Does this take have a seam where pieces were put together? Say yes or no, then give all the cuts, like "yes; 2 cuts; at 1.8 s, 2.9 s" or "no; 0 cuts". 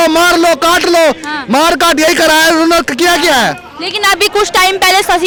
no; 0 cuts